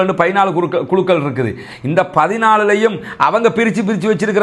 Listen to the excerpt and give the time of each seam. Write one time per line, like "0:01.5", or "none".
none